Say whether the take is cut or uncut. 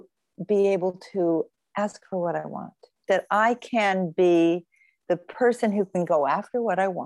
cut